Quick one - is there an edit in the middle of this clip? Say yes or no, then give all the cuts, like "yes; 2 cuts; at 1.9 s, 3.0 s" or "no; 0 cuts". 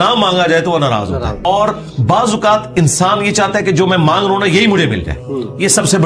yes; 1 cut; at 1.5 s